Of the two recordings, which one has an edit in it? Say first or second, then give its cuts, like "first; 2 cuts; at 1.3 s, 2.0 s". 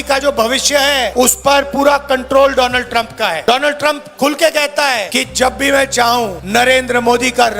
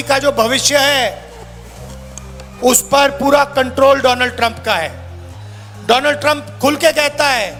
first; 4 cuts; at 1.1 s, 3.4 s, 5.1 s, 6.4 s